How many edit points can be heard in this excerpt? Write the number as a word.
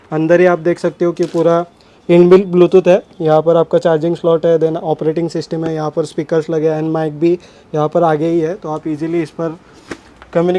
zero